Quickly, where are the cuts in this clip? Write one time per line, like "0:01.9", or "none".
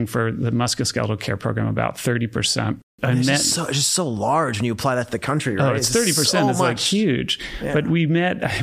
0:02.9